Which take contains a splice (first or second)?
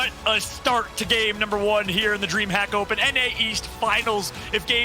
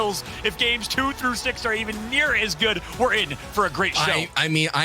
second